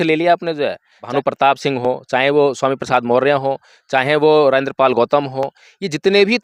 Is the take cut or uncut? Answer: cut